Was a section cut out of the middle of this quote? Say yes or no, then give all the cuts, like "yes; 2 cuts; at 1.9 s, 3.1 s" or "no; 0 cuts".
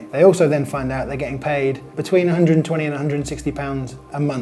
yes; 1 cut; at 1.9 s